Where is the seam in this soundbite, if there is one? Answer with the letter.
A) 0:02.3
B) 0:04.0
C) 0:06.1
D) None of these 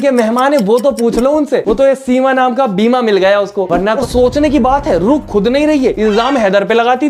B